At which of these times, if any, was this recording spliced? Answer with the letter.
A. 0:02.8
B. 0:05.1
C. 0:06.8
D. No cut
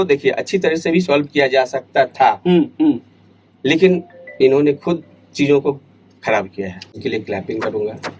C